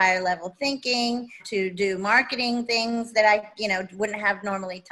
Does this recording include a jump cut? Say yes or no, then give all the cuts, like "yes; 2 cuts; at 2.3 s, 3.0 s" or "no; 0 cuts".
yes; 1 cut; at 1.4 s